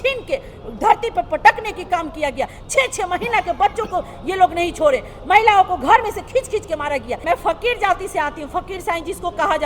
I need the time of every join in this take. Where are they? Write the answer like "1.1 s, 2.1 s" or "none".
7.2 s

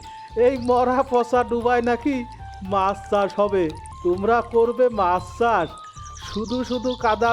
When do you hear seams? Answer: 3.9 s

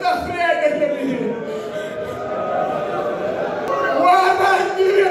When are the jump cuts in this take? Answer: 3.7 s

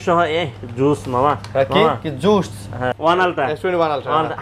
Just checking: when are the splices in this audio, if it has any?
2.8 s

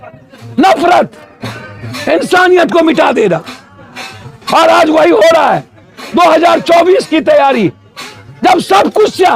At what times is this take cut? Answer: none

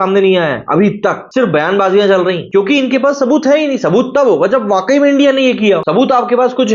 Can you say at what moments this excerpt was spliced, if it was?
none

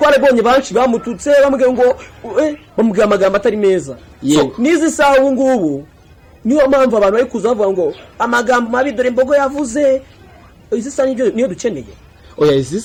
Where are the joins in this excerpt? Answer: none

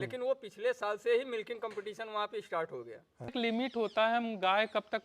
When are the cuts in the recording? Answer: 3.3 s

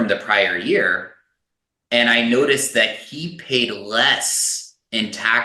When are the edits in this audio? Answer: none

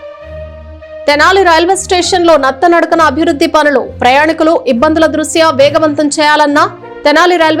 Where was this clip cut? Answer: 1.1 s

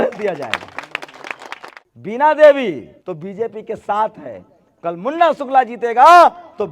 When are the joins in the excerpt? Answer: 1.7 s, 2.9 s

